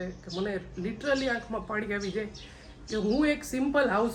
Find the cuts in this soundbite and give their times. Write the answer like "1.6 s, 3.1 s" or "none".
none